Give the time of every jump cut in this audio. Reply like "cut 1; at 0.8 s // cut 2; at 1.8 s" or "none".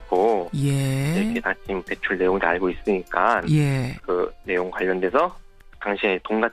none